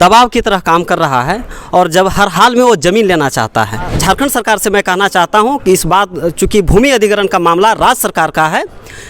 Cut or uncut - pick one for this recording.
cut